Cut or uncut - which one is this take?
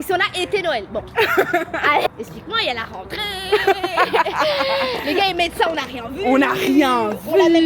uncut